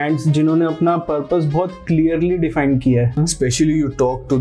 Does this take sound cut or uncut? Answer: cut